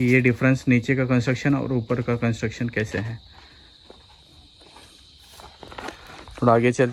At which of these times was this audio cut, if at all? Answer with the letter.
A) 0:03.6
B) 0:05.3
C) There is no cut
C